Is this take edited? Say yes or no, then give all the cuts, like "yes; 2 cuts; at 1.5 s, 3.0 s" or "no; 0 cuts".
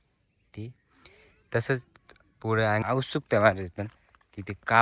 yes; 1 cut; at 2.8 s